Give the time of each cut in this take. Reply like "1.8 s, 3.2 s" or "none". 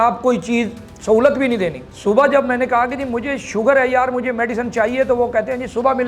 1.9 s